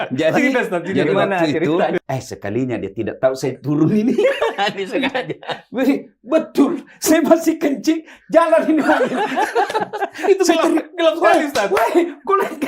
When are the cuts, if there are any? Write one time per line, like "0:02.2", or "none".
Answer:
0:02.0